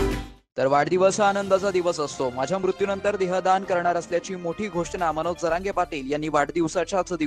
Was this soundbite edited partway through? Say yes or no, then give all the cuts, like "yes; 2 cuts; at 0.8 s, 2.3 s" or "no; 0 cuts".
no; 0 cuts